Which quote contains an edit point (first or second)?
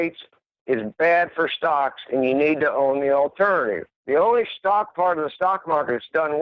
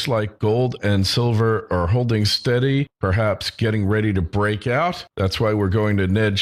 first